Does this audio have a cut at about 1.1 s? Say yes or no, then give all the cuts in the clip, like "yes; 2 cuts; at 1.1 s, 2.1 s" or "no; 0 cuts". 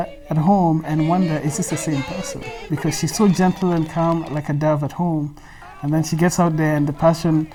no; 0 cuts